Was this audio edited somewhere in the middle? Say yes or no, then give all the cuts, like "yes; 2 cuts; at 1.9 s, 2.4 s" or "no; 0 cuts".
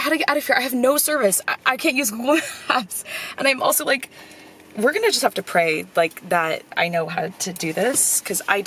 no; 0 cuts